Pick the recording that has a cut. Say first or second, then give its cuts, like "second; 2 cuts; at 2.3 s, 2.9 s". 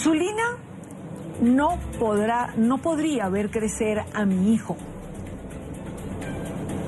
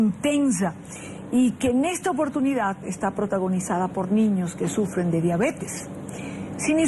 first; 1 cut; at 1.5 s